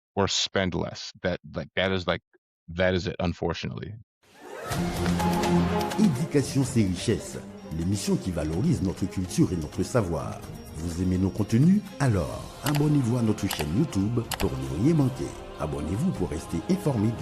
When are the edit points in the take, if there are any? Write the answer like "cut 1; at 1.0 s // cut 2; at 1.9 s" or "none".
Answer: cut 1; at 1.0 s // cut 2; at 4.0 s